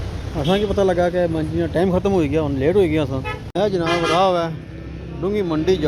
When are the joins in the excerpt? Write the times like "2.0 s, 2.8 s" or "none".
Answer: 3.5 s